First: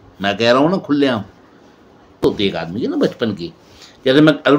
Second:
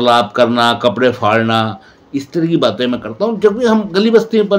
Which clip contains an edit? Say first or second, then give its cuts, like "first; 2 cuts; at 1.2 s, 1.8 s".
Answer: first; 1 cut; at 2.2 s